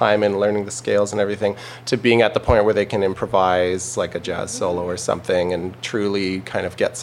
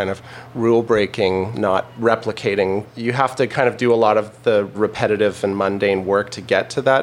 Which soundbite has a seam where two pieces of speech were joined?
second; 3 cuts; at 1.6 s, 3.0 s, 4.8 s

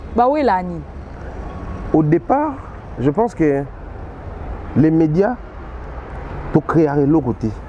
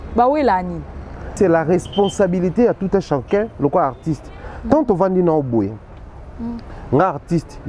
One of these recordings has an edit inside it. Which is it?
second; 1 cut; at 1.3 s

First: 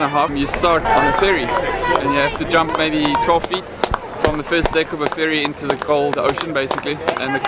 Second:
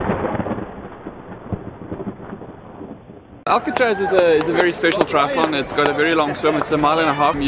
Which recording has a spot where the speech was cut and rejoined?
second; 1 cut; at 3.2 s

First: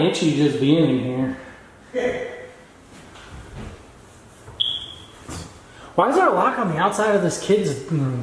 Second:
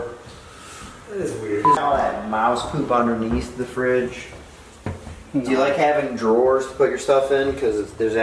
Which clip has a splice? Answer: second; 1 cut; at 1.8 s

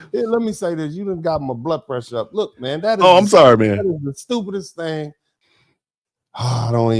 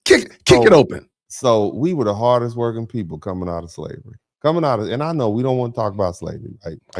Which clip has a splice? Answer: first; 1 cut; at 5.3 s

